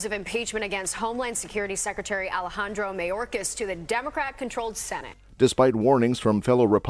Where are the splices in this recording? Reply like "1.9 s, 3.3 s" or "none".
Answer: none